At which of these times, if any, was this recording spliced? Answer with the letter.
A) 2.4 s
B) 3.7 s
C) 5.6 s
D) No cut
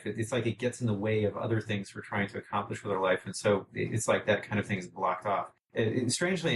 C